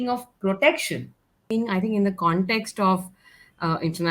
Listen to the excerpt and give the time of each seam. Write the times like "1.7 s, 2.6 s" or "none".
1.5 s